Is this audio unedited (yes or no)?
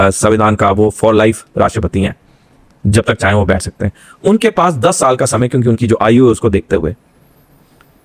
yes